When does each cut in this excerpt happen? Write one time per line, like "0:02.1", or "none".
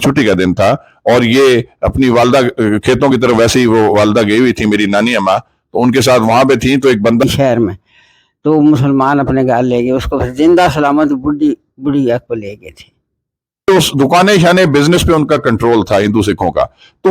0:07.2
0:13.7